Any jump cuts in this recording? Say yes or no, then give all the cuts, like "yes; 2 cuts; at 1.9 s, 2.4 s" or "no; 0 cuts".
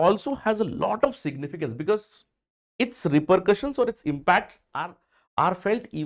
no; 0 cuts